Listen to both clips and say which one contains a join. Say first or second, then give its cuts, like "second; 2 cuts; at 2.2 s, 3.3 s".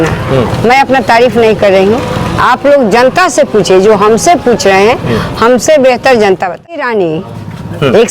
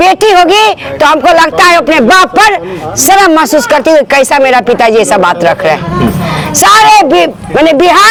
first; 1 cut; at 6.8 s